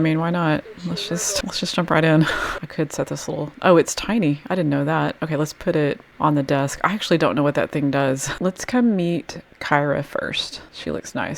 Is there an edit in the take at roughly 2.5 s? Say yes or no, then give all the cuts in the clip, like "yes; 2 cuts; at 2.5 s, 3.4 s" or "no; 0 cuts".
yes; 2 cuts; at 2.5 s, 8.3 s